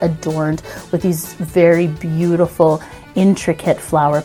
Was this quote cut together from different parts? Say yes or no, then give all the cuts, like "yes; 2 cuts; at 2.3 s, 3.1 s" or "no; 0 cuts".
no; 0 cuts